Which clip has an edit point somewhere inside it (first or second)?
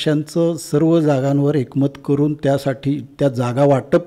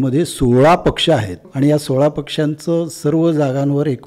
second